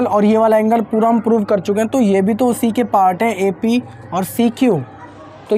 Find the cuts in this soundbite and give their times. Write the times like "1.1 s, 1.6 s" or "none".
none